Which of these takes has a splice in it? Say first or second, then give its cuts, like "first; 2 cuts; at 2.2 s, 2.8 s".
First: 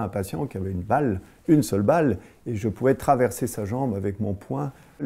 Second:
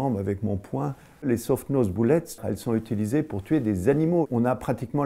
second; 2 cuts; at 2.4 s, 4.2 s